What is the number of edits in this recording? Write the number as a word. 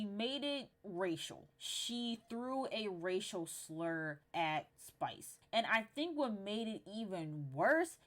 two